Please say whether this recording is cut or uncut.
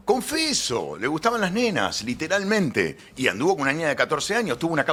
uncut